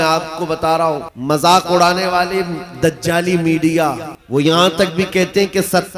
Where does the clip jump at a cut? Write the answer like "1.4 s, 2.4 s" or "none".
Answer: 1.1 s, 4.1 s